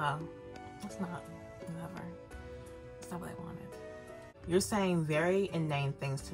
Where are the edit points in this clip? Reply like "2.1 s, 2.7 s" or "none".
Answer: 4.3 s